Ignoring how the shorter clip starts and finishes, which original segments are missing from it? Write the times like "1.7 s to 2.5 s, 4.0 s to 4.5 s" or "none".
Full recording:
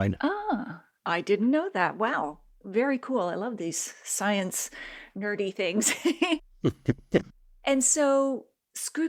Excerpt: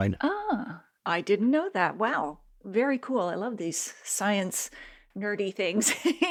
none